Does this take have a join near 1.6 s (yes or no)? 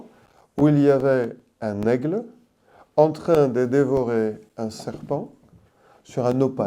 no